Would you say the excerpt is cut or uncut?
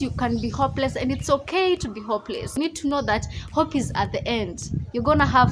cut